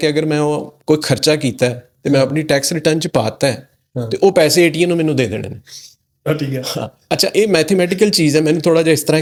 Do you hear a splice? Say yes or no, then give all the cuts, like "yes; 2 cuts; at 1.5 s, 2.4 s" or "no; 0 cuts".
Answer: no; 0 cuts